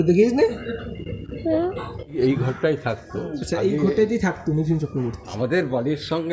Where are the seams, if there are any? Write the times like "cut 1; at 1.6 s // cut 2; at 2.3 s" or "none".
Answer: cut 1; at 2.1 s // cut 2; at 5.3 s

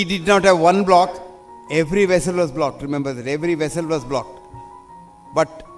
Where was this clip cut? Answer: none

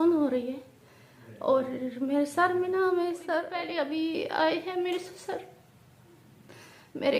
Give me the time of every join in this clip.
cut 1; at 3.6 s

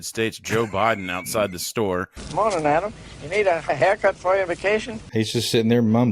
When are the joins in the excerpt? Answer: cut 1; at 5.0 s

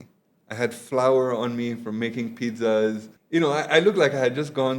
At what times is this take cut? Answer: cut 1; at 3.1 s

